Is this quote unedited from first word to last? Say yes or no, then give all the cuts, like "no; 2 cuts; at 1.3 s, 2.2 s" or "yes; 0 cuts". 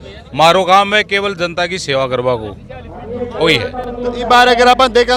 yes; 0 cuts